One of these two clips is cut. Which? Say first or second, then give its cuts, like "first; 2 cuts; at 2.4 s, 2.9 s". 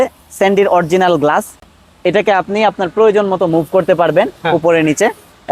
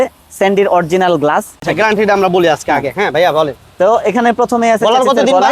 second; 1 cut; at 1.7 s